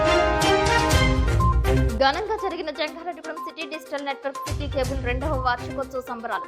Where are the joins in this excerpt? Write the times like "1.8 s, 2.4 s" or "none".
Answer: 1.8 s

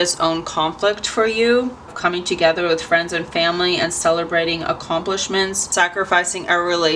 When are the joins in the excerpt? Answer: 1.9 s, 5.6 s

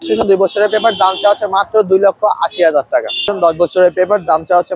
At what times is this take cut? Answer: 3.2 s

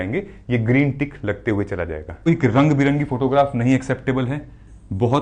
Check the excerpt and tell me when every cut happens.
2.3 s

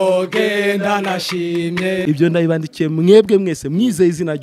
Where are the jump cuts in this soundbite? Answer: 2.0 s

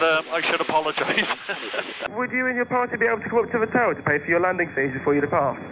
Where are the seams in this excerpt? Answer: 2.0 s

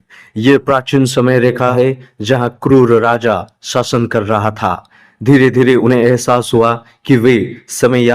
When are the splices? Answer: 1.7 s

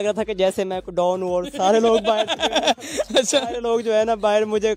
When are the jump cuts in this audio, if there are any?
none

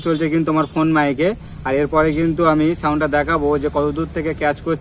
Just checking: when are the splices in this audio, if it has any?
none

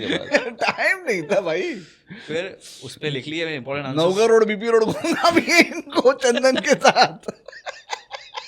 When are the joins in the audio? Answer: none

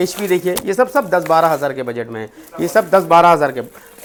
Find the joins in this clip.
none

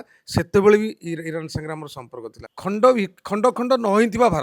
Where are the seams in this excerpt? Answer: 2.5 s

